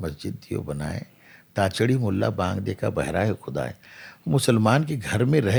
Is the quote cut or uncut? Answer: uncut